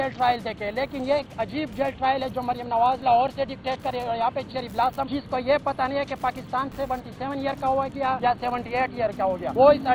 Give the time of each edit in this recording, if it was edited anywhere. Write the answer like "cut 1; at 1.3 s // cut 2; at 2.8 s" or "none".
none